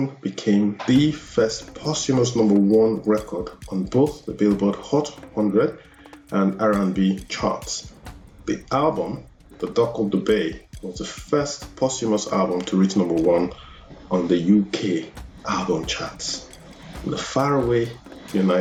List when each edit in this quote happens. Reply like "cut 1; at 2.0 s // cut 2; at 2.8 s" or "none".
none